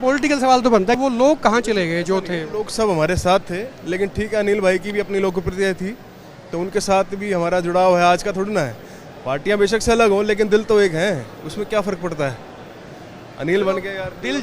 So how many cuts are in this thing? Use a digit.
1